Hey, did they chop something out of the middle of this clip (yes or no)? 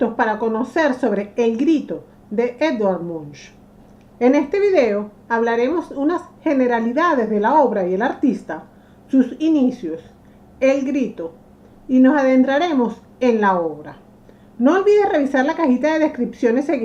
no